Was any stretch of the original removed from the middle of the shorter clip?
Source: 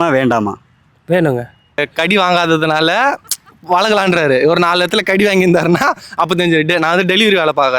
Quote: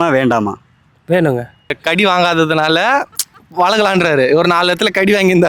yes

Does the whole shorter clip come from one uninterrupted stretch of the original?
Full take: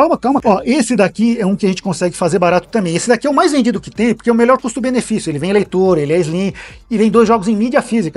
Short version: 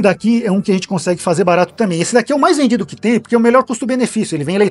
yes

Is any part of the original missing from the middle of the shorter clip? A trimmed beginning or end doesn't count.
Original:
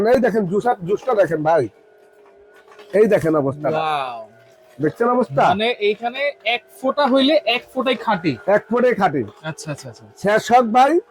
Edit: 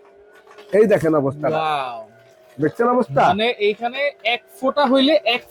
no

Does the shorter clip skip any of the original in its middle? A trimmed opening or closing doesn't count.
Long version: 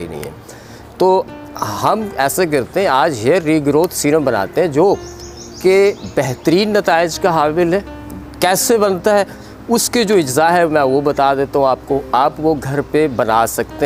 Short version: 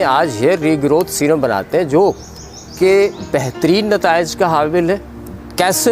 no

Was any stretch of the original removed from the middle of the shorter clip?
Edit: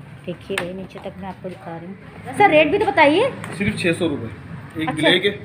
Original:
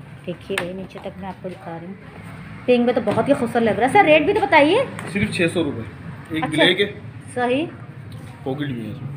yes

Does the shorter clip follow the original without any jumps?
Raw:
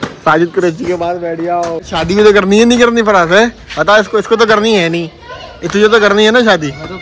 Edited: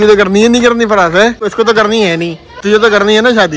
no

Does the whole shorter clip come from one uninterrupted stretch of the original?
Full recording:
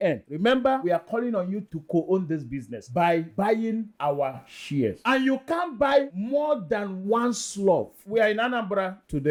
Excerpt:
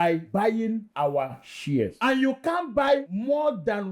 yes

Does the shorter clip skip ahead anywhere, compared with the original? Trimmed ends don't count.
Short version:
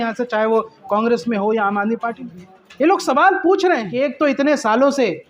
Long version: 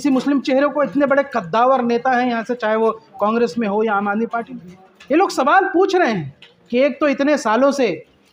yes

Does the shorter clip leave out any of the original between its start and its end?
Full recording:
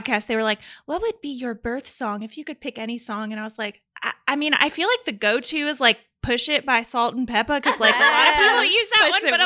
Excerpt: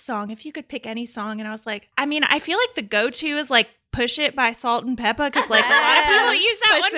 yes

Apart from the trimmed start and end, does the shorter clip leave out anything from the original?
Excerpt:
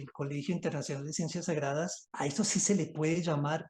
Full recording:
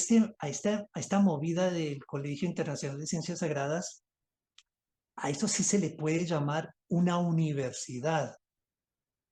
yes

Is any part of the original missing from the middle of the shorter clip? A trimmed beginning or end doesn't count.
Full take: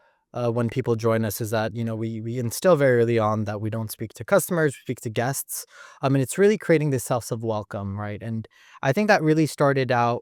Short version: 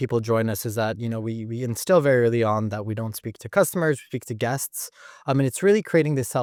no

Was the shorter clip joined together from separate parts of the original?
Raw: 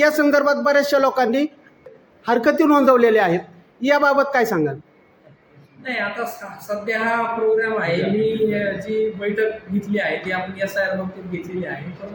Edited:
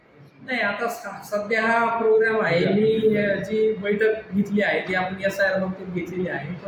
no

